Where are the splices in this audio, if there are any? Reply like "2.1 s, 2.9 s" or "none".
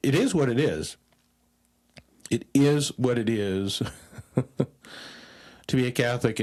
none